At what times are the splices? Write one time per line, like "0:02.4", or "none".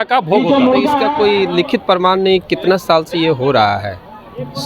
0:00.9